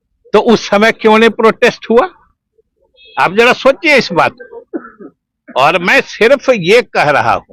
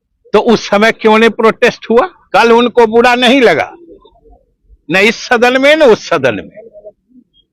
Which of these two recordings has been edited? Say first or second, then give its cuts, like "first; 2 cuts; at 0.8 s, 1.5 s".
second; 1 cut; at 2.2 s